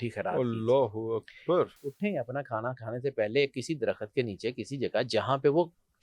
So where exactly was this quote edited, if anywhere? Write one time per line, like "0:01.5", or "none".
0:01.8

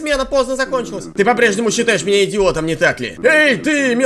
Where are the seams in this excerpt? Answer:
0:01.0
0:03.1

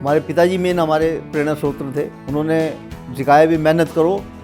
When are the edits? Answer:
0:02.2

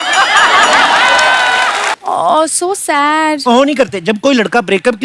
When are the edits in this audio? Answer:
0:02.0

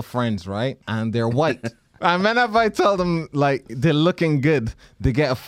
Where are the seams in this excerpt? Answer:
0:00.8
0:01.8

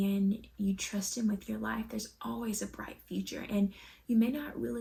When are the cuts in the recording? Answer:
none

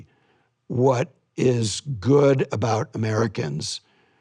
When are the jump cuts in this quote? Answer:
0:01.2

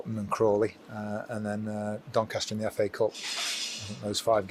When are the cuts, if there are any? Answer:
none

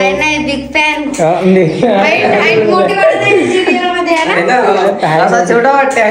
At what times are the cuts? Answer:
none

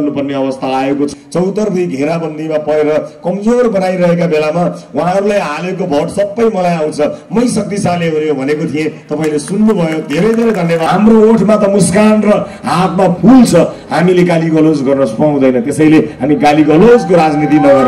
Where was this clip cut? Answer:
0:01.1
0:10.8

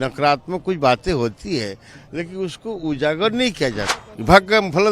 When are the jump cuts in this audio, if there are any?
0:03.9

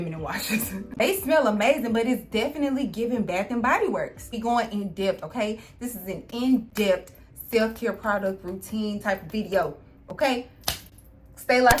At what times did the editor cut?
0:00.9
0:04.4

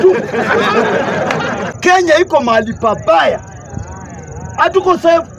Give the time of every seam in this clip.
0:01.7

